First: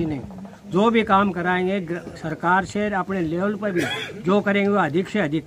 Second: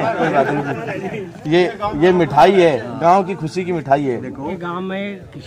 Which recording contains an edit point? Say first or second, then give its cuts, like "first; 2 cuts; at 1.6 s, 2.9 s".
second; 1 cut; at 4.6 s